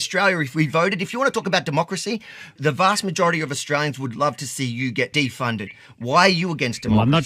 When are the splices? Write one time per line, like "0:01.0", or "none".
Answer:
0:05.1